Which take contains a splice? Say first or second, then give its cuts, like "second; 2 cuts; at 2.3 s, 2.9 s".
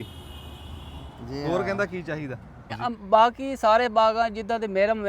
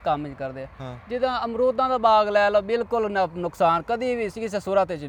first; 1 cut; at 2.8 s